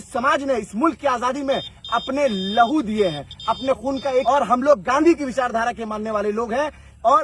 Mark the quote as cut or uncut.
cut